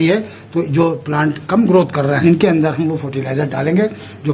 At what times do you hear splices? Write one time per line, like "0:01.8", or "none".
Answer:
0:02.2

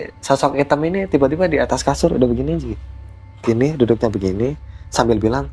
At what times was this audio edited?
none

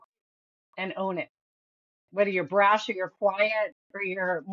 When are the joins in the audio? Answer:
none

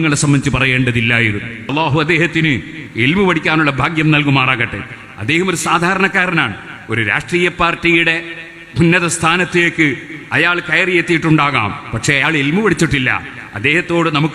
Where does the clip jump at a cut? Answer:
0:01.7

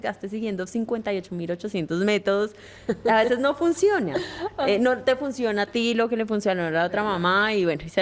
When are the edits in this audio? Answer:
none

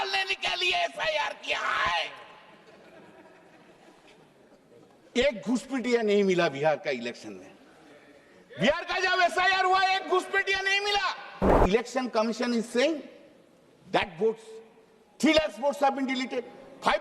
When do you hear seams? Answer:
0:11.5

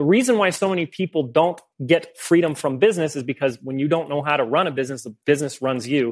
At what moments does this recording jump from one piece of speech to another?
0:01.7

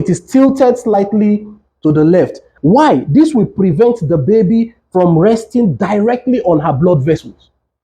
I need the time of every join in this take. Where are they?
0:02.5

